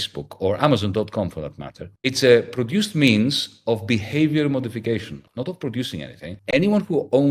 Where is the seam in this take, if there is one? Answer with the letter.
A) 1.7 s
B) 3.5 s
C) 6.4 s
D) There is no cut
C